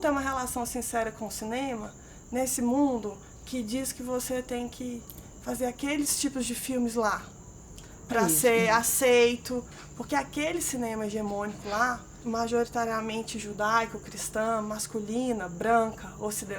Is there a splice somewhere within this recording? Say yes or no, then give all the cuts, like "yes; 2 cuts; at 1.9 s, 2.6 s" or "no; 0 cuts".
yes; 2 cuts; at 9.8 s, 12.2 s